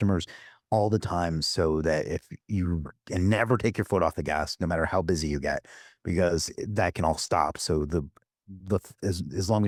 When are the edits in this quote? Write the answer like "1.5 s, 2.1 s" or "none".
none